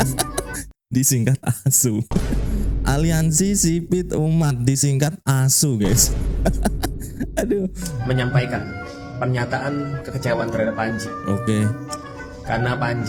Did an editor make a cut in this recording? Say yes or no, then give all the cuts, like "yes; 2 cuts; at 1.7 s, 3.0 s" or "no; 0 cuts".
no; 0 cuts